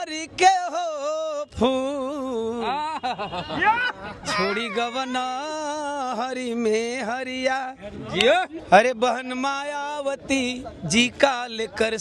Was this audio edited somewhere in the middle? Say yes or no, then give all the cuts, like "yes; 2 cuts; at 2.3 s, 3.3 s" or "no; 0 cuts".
yes; 1 cut; at 8.6 s